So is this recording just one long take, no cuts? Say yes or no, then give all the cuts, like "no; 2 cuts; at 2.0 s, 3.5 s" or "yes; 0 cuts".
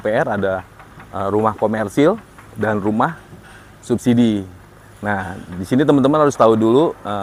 yes; 0 cuts